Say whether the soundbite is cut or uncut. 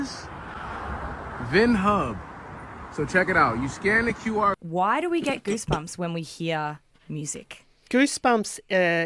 cut